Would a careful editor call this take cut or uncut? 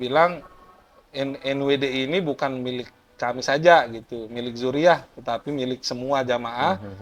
uncut